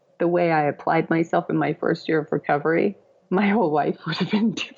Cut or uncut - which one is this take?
cut